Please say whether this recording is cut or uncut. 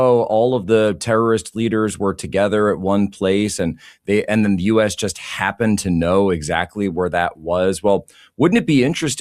uncut